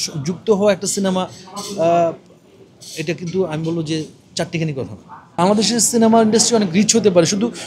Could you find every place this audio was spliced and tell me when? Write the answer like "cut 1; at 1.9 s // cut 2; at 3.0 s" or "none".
cut 1; at 5.4 s

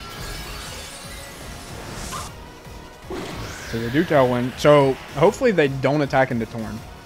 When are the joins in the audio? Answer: cut 1; at 2.3 s

